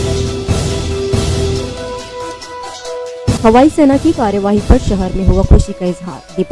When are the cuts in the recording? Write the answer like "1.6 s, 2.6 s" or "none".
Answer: none